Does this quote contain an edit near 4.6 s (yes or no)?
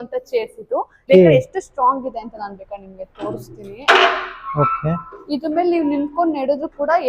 no